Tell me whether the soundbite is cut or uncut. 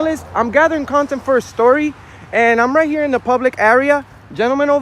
uncut